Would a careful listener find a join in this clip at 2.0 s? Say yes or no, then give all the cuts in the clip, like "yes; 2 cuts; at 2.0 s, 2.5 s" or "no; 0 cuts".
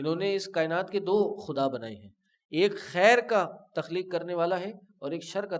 no; 0 cuts